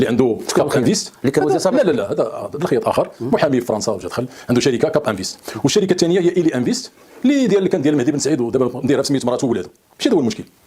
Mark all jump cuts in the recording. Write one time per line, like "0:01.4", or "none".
none